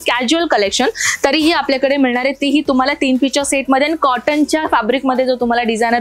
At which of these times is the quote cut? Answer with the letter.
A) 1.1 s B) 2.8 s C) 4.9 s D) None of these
D